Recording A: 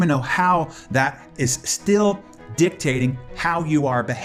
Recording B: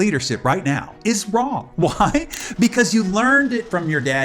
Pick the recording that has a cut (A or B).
B